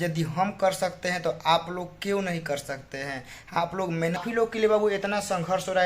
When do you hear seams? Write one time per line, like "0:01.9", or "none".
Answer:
0:04.2